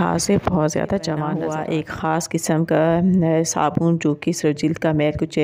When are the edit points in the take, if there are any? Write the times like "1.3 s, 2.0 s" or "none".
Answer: 1.3 s